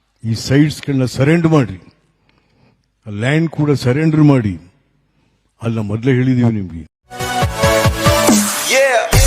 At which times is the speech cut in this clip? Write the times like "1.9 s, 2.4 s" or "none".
none